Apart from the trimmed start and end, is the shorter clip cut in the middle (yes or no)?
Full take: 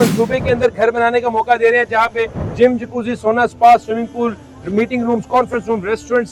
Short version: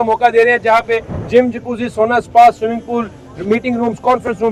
no